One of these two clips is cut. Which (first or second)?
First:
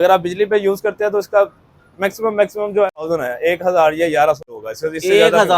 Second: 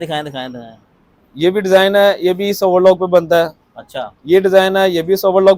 first